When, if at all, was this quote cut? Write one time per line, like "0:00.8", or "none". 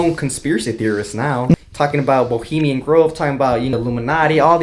0:01.5
0:03.7